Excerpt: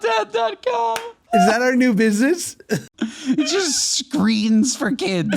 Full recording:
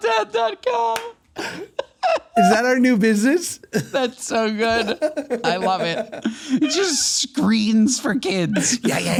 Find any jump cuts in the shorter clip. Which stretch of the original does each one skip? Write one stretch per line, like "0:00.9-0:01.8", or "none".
0:01.2-0:02.3
0:03.9-0:06.1